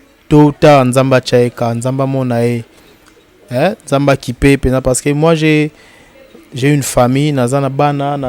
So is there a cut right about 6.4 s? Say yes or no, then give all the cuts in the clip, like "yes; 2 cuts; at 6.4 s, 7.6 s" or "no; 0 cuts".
no; 0 cuts